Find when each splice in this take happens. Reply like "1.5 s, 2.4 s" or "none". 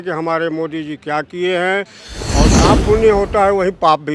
2.5 s

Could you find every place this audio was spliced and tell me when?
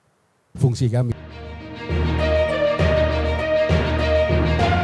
1.3 s

